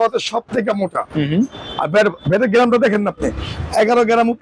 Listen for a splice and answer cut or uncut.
uncut